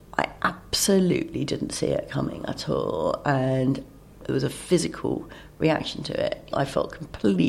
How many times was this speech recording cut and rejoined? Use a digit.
2